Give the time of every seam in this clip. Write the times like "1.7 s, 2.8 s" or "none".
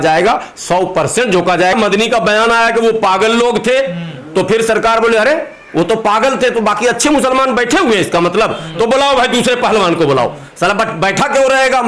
1.7 s